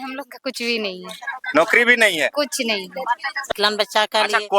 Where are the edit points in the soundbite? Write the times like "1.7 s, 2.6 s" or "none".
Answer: 3.5 s